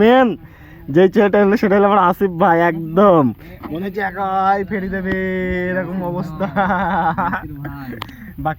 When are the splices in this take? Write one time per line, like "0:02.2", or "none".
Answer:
none

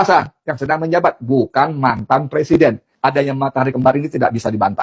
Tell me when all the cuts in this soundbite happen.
0:02.9

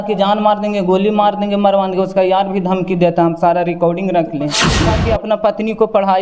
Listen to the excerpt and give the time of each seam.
0:04.7

